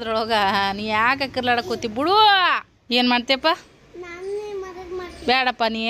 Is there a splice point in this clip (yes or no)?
yes